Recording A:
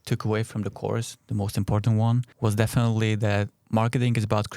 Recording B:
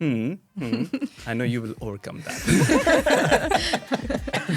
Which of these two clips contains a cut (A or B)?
A